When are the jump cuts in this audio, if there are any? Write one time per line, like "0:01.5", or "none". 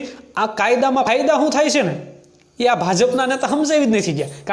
0:01.1